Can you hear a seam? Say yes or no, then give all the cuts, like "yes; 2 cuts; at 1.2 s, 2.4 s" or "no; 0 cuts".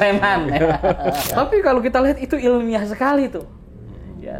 yes; 1 cut; at 1.3 s